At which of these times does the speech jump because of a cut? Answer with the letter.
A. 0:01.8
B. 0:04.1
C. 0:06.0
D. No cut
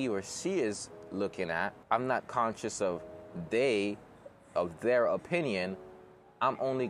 A